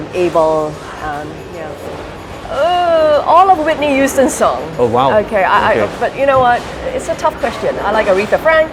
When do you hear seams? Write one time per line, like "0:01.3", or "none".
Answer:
0:01.8